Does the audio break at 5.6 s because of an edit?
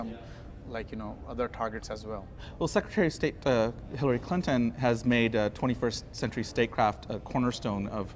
yes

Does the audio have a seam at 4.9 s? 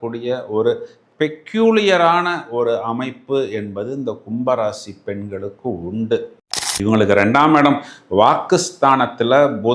no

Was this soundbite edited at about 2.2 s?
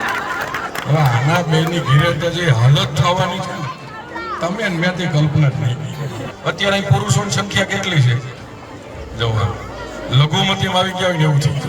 no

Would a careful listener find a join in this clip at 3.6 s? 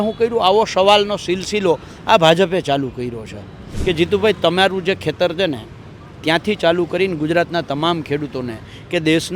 yes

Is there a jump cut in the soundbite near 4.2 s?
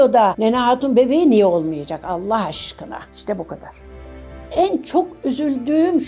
yes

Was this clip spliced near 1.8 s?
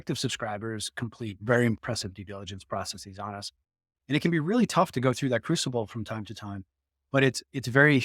yes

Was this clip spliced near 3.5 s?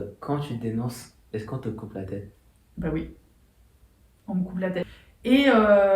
no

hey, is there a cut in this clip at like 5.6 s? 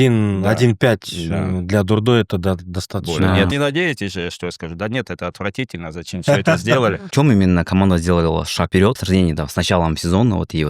no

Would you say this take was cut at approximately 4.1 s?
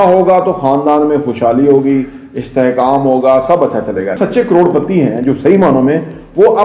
yes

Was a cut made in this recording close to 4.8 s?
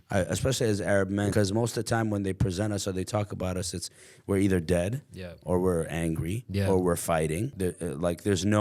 no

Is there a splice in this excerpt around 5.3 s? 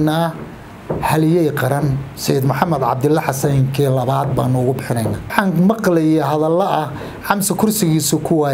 yes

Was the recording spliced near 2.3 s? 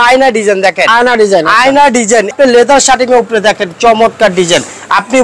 yes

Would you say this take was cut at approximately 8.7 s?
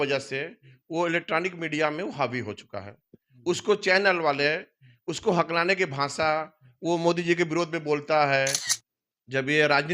yes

